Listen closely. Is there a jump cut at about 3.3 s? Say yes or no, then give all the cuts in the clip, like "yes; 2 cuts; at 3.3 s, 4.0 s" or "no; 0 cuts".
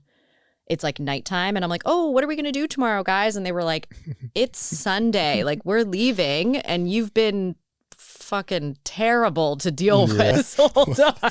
no; 1 cut; at 10.3 s